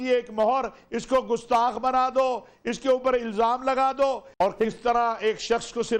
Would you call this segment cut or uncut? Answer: uncut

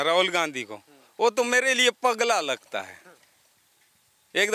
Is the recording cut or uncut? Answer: uncut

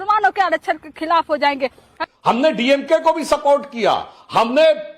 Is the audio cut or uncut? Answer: cut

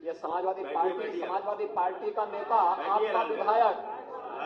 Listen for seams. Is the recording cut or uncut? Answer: uncut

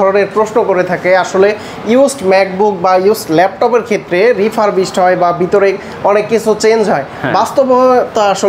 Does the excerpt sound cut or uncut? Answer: uncut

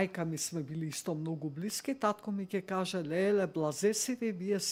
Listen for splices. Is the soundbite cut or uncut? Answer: uncut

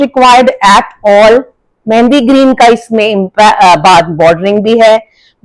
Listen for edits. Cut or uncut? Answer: uncut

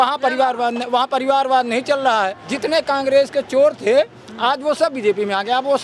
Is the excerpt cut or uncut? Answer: cut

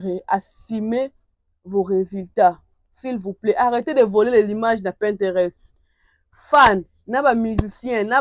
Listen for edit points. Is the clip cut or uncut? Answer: uncut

